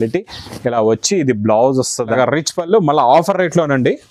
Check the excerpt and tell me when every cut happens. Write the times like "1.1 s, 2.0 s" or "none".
2.1 s

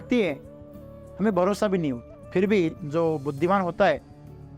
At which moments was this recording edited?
2.1 s

